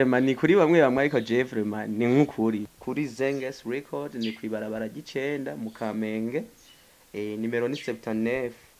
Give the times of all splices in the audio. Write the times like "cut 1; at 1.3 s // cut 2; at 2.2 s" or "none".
cut 1; at 2.7 s